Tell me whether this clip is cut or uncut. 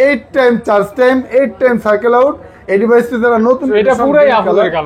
cut